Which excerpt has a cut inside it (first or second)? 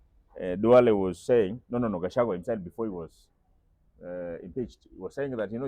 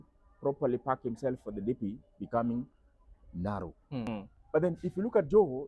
second